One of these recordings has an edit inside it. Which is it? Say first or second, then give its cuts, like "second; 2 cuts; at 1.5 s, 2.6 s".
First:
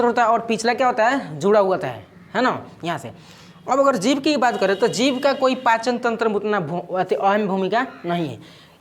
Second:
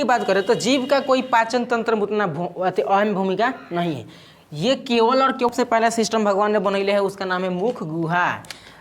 second; 1 cut; at 5.5 s